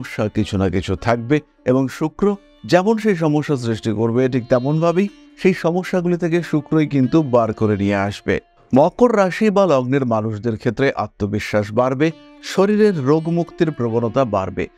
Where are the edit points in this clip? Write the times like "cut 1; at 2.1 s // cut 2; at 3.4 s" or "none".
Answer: none